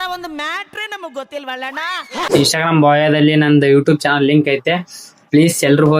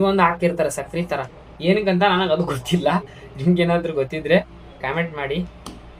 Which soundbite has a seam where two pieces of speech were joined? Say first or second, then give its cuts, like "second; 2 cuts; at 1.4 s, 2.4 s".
first; 1 cut; at 2.1 s